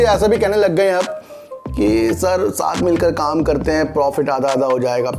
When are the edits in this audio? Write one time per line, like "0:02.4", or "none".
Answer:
none